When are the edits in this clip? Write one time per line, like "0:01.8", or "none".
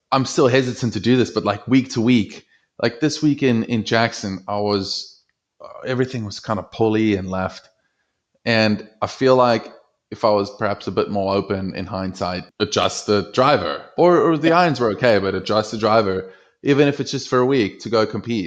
0:12.4